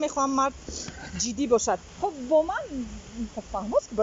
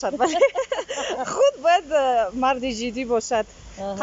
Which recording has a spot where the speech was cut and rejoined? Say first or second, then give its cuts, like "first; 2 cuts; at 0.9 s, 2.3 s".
first; 1 cut; at 1.9 s